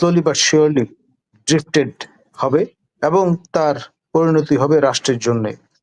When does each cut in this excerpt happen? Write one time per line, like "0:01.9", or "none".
none